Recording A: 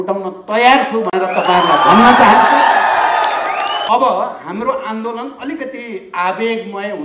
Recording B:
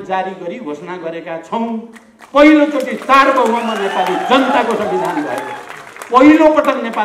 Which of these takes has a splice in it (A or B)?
A